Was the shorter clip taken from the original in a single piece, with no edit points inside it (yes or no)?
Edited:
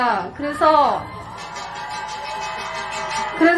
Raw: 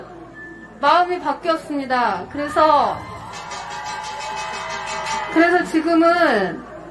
yes